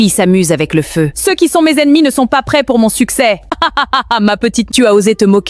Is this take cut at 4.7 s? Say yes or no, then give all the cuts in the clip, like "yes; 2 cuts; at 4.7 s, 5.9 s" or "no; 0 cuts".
yes; 3 cuts; at 1.2 s, 3.5 s, 4.7 s